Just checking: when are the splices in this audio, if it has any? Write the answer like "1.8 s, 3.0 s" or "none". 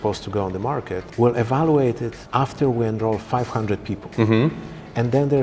1.0 s, 2.1 s

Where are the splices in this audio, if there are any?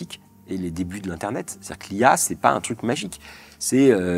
none

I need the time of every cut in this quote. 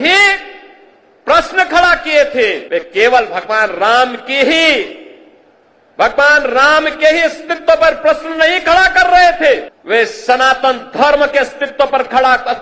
2.6 s, 9.7 s

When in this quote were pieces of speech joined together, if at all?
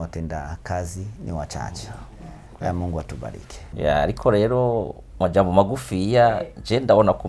3.6 s

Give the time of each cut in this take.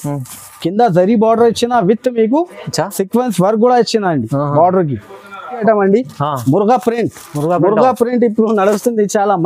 5.6 s

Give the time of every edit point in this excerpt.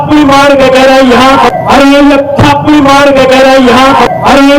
1.0 s

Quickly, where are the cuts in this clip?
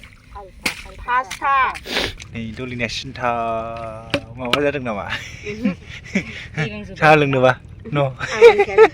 2.2 s

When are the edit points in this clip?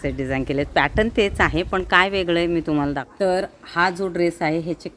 3.0 s

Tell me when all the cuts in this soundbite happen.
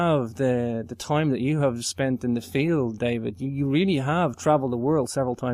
3.0 s

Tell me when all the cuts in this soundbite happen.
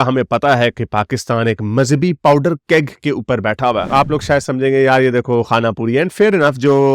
3.8 s

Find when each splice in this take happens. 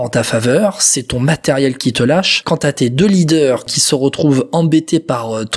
none

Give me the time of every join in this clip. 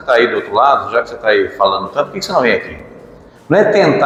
none

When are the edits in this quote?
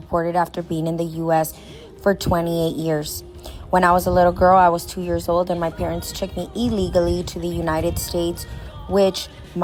none

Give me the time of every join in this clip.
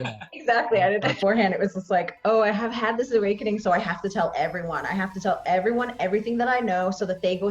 1.2 s

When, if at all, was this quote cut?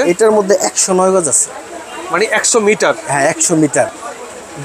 none

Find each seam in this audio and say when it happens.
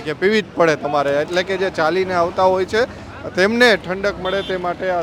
none

